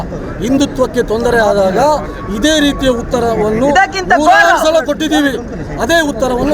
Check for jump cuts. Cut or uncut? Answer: uncut